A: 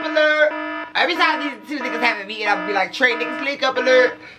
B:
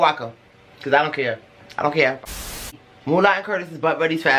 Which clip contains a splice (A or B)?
B